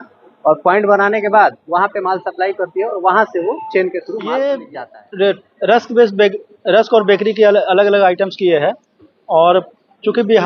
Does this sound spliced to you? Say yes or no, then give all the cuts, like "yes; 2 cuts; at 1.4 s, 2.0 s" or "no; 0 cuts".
yes; 1 cut; at 4.6 s